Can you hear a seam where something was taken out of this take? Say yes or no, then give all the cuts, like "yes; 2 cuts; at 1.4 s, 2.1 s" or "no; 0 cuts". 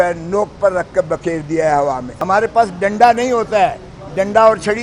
yes; 1 cut; at 2.1 s